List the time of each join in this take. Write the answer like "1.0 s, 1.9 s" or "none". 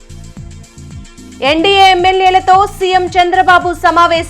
none